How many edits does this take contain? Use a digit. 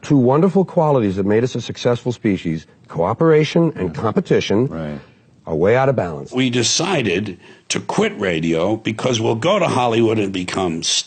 1